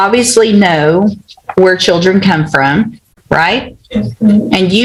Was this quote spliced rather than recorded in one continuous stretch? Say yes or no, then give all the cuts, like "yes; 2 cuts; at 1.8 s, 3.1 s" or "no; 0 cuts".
no; 0 cuts